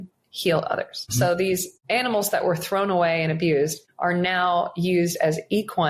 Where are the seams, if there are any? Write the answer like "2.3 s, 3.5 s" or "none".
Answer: 1.0 s, 1.7 s, 3.9 s